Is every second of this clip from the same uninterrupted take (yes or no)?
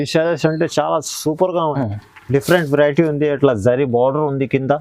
no